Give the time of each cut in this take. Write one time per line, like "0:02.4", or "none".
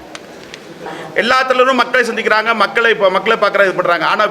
0:01.0